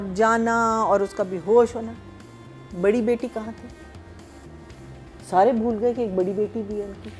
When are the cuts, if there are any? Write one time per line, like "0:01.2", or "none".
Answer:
none